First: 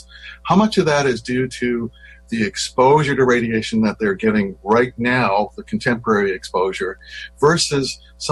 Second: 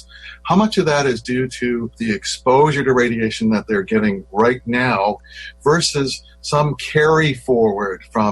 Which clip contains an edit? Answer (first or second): second